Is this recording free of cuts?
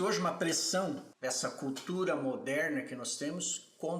no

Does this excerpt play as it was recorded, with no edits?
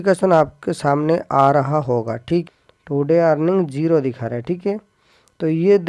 no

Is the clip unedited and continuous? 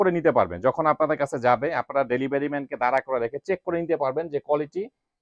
yes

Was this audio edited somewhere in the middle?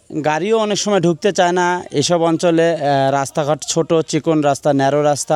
no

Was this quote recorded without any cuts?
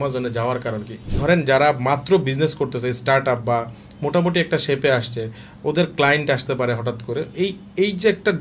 no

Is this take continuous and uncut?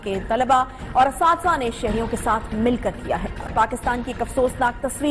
no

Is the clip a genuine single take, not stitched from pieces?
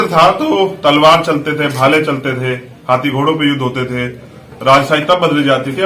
yes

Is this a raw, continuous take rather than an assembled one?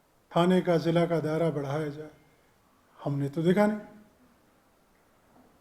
yes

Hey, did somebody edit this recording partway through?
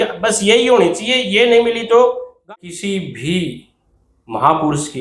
yes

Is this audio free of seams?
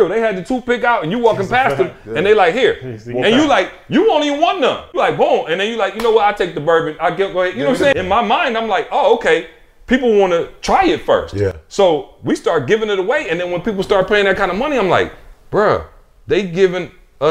no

